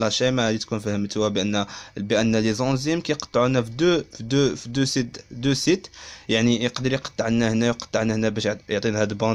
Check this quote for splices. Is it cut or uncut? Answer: uncut